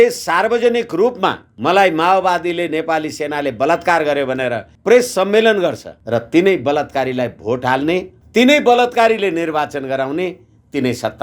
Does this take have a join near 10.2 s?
no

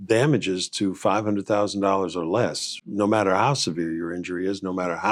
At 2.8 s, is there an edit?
no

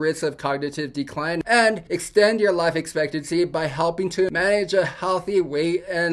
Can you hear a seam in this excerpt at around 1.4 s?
yes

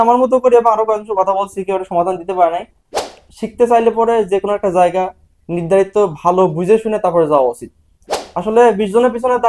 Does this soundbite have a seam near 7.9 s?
yes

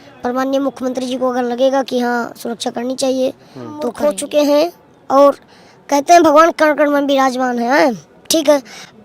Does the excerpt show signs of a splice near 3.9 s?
yes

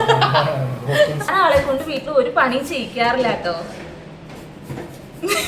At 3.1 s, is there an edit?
no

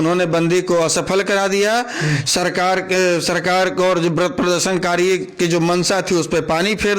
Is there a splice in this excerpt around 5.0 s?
no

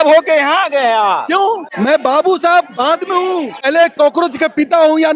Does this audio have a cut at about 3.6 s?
yes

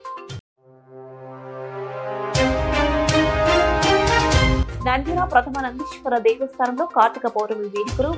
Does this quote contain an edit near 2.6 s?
no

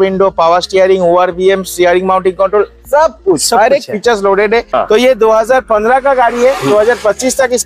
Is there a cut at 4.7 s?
yes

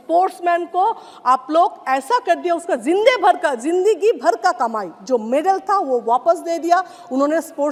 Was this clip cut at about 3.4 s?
no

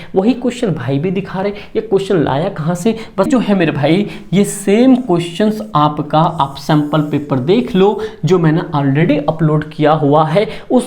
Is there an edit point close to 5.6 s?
no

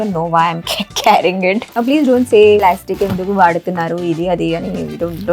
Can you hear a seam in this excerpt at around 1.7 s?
yes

